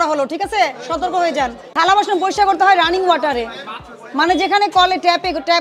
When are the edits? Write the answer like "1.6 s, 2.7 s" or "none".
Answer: 1.6 s